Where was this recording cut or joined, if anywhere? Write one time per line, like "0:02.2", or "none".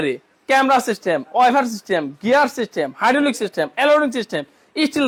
none